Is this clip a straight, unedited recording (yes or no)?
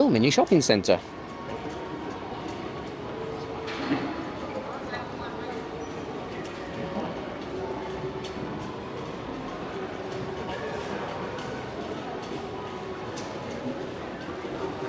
yes